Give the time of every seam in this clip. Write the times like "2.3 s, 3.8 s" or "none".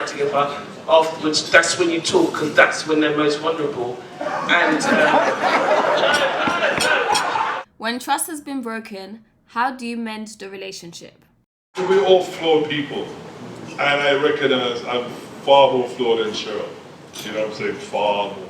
7.6 s, 11.7 s